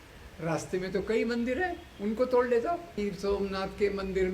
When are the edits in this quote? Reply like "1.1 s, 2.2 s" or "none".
3.0 s